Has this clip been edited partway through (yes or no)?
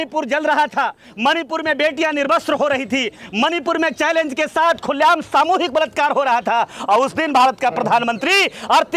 no